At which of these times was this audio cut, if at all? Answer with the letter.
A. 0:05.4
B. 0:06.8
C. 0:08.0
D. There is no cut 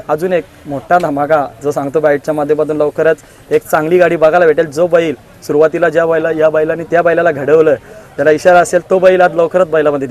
D